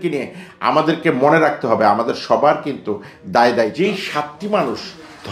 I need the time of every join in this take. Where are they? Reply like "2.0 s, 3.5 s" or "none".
3.8 s